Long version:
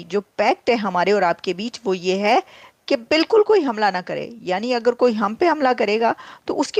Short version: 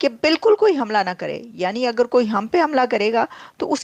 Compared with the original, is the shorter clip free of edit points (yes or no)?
yes